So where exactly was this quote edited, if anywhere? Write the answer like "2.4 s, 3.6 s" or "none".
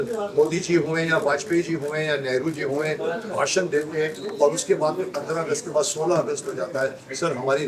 none